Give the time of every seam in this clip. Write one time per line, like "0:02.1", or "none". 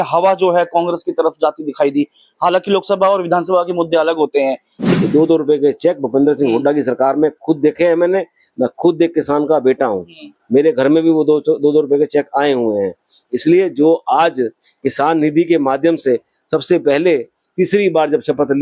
0:04.8